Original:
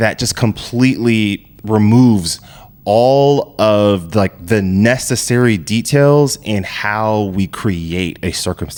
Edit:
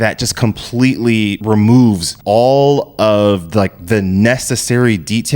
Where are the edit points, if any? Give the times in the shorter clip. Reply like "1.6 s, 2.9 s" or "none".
1.4 s, 2.1 s